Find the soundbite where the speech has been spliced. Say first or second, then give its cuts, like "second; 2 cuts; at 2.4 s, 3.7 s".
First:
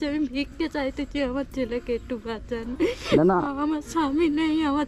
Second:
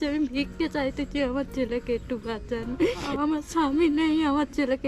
second; 1 cut; at 3.1 s